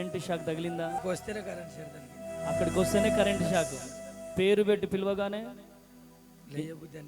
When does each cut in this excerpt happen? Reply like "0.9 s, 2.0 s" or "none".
0.9 s